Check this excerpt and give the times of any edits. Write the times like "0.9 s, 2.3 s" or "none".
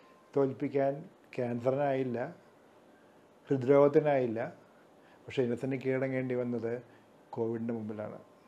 none